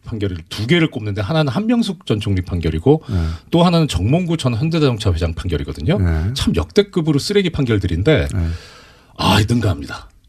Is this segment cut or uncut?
uncut